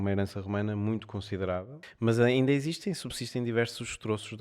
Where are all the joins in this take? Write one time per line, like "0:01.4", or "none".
0:01.8